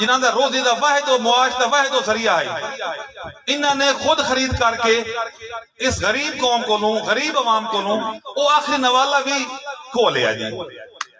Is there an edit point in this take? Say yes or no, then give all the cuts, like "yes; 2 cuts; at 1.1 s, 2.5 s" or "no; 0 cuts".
no; 0 cuts